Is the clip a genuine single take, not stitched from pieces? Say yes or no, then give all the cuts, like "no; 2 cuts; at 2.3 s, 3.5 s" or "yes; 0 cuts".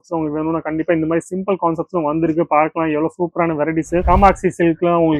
no; 1 cut; at 4.0 s